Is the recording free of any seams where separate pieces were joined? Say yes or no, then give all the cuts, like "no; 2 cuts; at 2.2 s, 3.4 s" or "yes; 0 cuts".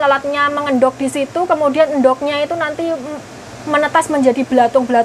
yes; 0 cuts